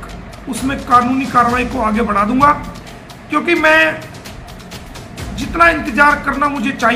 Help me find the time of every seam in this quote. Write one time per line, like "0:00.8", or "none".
none